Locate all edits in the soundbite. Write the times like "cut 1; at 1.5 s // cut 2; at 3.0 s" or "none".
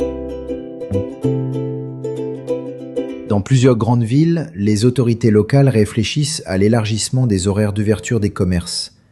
cut 1; at 3.2 s